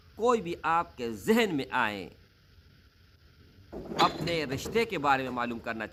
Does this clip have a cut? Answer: no; 0 cuts

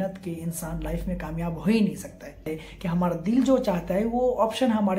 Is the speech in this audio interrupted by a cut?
yes; 1 cut; at 2.6 s

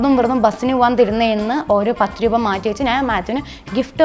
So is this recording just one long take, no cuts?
yes; 0 cuts

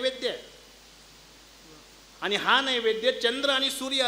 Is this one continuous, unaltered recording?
yes; 0 cuts

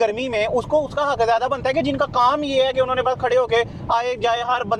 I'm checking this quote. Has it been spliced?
no; 0 cuts

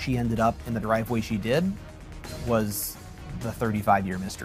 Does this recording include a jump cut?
no; 0 cuts

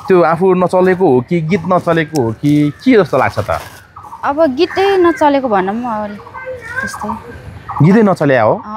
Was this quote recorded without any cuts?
yes; 0 cuts

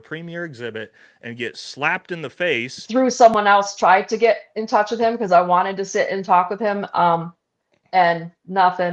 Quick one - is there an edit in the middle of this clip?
yes; 1 cut; at 2.7 s

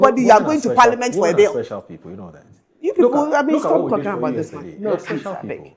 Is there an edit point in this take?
no; 0 cuts

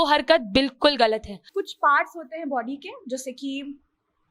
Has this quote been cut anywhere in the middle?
yes; 1 cut; at 1.4 s

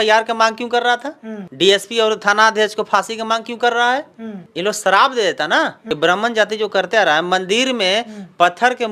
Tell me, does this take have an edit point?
yes; 1 cut; at 5.8 s

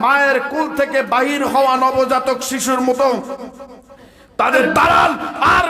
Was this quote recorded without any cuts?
no; 1 cut; at 4.7 s

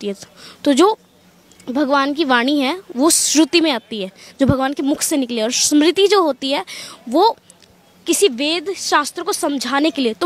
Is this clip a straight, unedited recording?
yes; 0 cuts

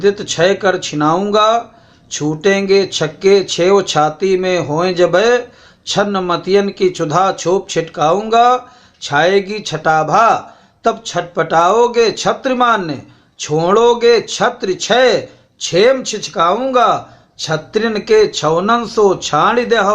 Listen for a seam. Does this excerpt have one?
no; 0 cuts

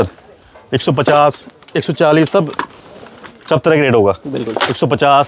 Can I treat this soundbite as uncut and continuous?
yes; 0 cuts

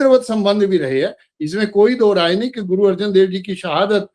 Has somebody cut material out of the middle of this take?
no; 0 cuts

